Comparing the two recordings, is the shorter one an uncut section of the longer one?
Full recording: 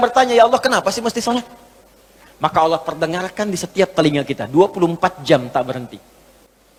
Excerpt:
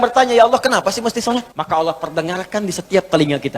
no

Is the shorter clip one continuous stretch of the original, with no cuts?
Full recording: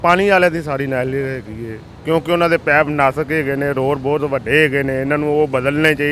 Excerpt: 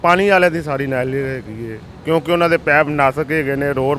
yes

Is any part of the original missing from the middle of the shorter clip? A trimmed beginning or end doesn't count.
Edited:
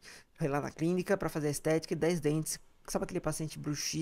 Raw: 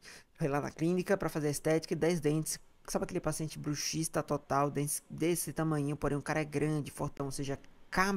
no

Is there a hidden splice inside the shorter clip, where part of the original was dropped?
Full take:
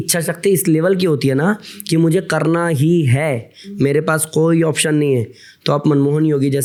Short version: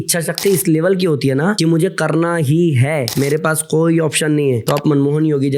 yes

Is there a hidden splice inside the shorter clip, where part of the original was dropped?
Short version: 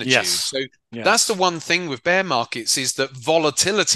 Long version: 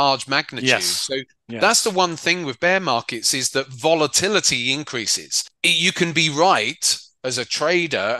no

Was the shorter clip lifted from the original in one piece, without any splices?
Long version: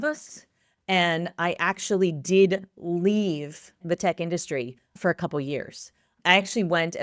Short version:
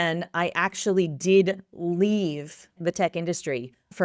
yes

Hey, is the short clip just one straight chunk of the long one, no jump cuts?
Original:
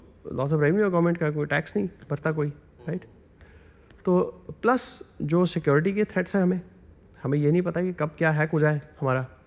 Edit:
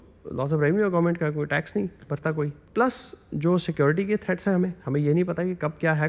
no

